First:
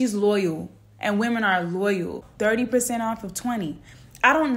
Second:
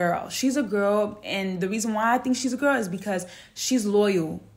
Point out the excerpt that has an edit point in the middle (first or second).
first